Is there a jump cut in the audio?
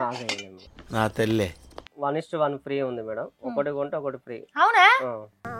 yes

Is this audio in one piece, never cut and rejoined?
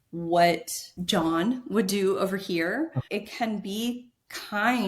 no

